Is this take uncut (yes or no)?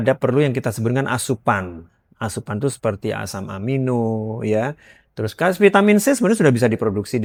yes